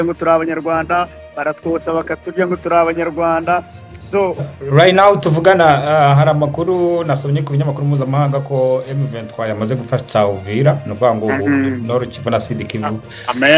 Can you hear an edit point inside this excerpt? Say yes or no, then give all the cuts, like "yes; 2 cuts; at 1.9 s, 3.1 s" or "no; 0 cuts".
yes; 1 cut; at 4.5 s